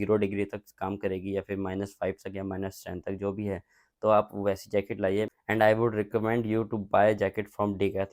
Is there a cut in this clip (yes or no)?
no